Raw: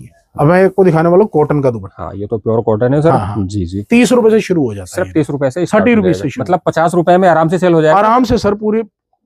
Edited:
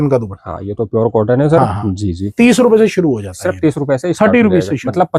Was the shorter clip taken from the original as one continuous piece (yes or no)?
yes